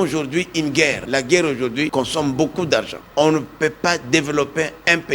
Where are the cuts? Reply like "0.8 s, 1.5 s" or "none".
1.0 s, 1.9 s, 3.0 s